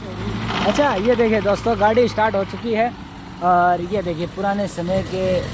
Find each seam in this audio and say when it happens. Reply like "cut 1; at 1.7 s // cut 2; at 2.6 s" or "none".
none